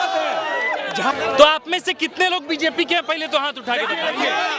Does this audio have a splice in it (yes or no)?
yes